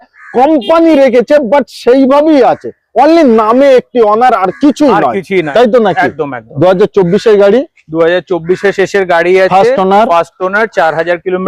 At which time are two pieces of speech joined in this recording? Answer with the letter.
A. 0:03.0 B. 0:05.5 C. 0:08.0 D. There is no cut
B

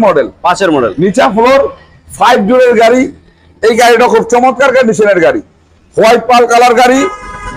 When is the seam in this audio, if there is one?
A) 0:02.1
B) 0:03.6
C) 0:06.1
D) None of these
D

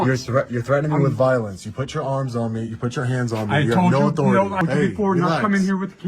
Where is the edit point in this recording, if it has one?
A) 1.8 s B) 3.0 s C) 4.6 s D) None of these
C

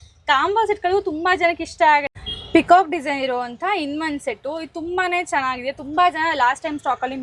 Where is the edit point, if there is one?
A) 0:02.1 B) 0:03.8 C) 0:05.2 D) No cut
A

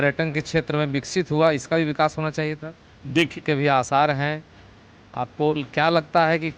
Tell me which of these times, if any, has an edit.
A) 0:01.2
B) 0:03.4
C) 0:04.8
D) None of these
B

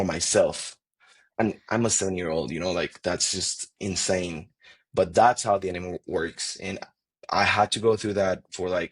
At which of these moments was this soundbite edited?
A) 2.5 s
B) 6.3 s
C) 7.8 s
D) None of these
D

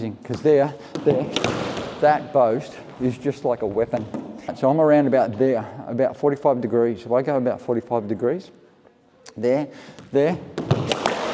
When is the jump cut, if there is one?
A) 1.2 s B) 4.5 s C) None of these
B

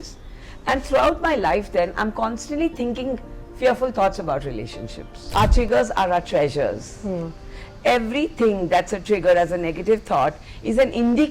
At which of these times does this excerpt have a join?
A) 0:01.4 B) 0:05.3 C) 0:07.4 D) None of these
B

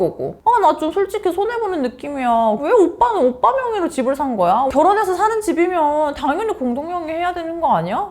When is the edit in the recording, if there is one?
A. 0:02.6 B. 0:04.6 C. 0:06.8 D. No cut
A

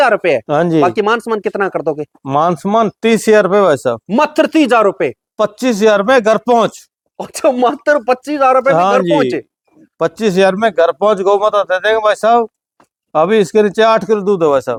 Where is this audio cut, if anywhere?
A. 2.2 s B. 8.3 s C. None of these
C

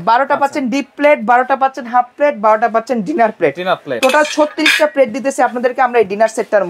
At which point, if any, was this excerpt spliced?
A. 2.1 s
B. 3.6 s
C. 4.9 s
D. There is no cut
D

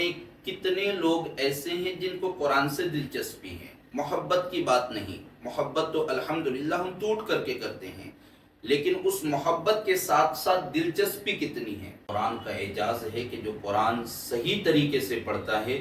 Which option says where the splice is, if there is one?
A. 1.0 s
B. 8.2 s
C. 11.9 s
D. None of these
C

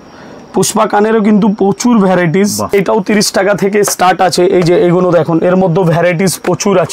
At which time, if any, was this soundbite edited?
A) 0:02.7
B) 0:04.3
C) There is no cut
A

